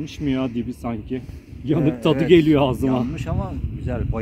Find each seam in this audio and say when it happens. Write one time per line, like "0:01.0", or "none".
none